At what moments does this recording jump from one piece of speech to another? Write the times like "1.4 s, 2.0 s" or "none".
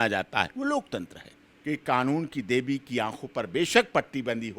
1.5 s